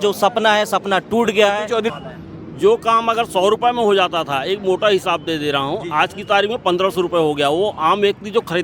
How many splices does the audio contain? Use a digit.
1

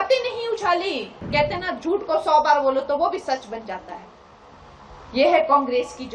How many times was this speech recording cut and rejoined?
1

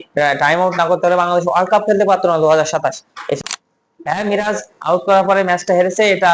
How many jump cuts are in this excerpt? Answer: 1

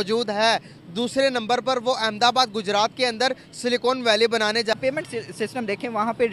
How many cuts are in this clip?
1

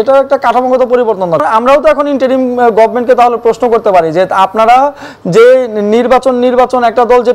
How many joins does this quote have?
1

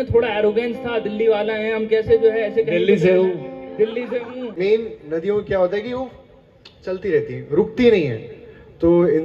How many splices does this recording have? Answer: 1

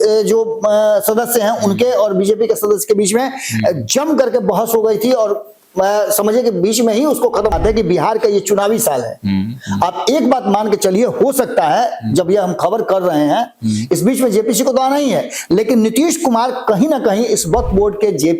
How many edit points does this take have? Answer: 1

